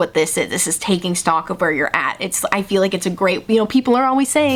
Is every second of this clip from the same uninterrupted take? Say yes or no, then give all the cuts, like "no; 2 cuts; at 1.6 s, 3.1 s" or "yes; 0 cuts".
yes; 0 cuts